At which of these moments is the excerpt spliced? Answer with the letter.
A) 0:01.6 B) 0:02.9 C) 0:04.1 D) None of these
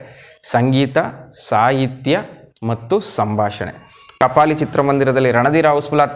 C